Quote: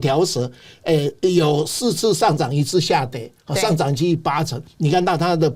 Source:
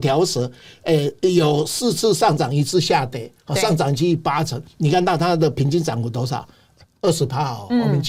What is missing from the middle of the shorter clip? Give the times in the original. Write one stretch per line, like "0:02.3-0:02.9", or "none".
none